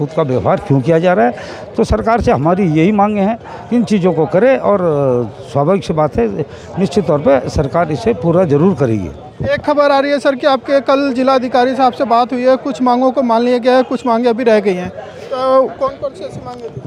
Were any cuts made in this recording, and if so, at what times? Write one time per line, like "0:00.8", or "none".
none